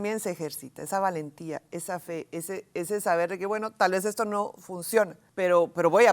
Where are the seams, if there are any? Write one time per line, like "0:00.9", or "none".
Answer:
0:05.2